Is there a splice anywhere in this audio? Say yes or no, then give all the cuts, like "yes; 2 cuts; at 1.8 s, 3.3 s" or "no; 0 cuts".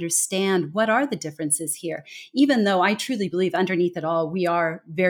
no; 0 cuts